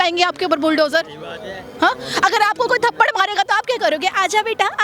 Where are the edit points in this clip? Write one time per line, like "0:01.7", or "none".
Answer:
none